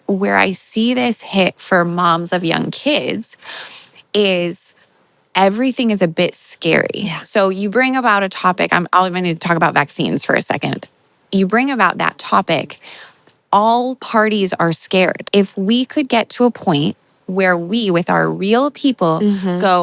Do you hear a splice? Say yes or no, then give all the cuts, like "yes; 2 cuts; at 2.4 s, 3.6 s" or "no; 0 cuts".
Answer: yes; 1 cut; at 15.2 s